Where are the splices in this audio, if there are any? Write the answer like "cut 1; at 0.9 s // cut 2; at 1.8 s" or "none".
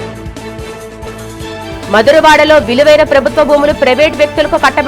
cut 1; at 1.0 s